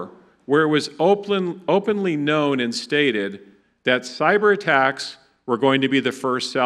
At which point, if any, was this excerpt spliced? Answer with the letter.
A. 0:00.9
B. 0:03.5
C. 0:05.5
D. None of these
D